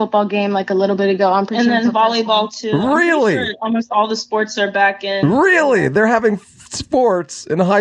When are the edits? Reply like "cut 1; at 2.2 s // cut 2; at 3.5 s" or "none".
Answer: none